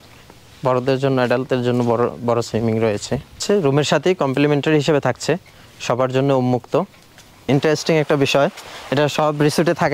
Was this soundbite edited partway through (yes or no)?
yes